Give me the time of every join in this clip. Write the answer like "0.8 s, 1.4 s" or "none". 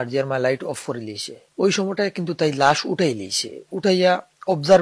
none